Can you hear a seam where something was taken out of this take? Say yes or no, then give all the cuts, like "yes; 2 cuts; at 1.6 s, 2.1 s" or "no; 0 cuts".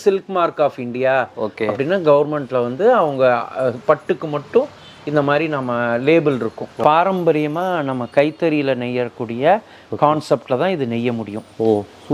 yes; 1 cut; at 6.7 s